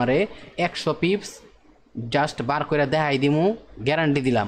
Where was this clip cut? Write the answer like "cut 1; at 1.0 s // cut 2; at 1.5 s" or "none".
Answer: none

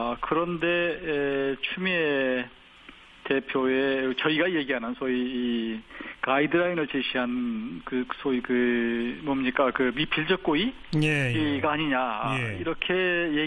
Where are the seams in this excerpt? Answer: cut 1; at 5.9 s

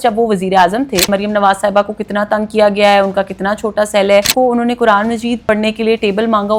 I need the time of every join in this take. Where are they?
cut 1; at 1.1 s // cut 2; at 4.3 s // cut 3; at 5.4 s

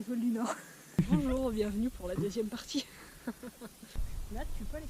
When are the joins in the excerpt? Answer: cut 1; at 1.0 s // cut 2; at 4.1 s

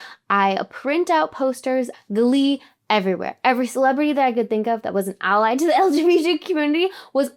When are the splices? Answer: cut 1; at 1.9 s

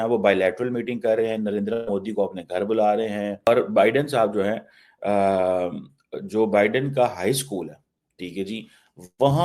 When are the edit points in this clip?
cut 1; at 3.5 s

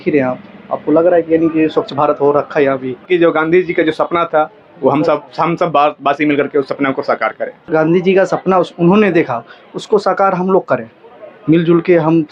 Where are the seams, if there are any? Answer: cut 1; at 3.0 s // cut 2; at 7.7 s

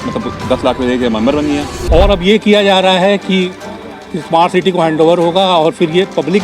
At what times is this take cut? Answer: cut 1; at 1.7 s

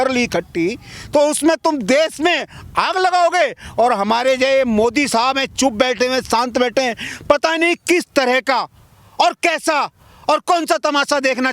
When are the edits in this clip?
none

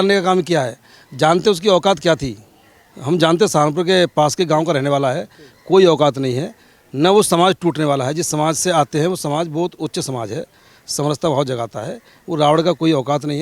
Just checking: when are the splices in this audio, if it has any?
none

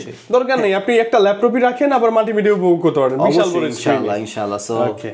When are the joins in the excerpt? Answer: none

